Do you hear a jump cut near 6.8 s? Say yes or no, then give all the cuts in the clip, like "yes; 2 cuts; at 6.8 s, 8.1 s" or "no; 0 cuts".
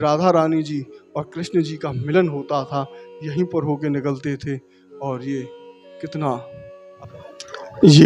yes; 1 cut; at 6.8 s